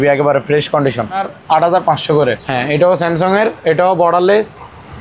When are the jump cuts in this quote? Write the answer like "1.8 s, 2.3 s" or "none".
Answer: 1.3 s, 2.4 s